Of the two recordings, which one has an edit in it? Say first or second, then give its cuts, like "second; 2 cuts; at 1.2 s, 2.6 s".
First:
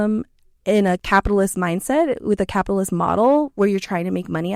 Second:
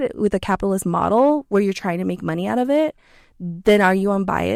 first; 1 cut; at 1.0 s